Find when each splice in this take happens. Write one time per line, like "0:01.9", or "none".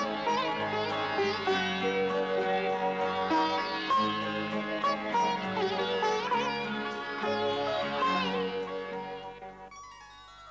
0:07.9